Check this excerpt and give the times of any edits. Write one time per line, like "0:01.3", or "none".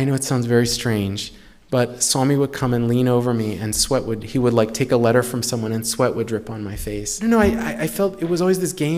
0:07.1